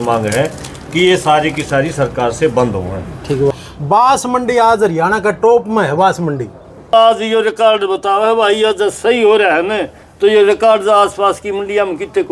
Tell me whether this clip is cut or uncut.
cut